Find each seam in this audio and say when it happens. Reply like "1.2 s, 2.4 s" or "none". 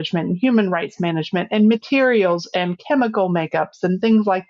none

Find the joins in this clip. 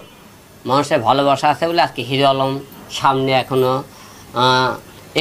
none

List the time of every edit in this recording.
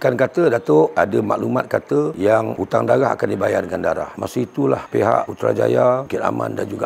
0.9 s, 4.1 s

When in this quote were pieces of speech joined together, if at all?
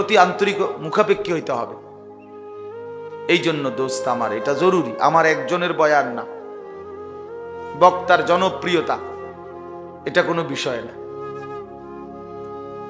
6.2 s, 7.8 s

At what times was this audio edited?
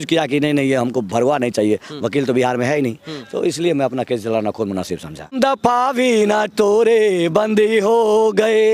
5.4 s

